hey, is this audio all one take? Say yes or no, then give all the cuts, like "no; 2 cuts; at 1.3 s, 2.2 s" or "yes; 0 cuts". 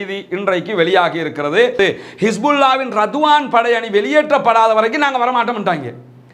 no; 1 cut; at 1.8 s